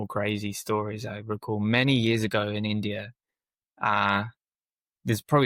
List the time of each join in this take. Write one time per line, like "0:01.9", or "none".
none